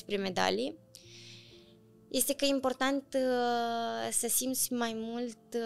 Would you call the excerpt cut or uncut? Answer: uncut